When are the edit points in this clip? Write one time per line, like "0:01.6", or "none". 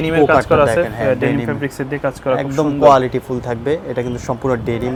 none